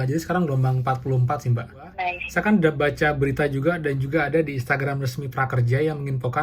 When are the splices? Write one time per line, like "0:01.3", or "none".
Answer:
0:02.1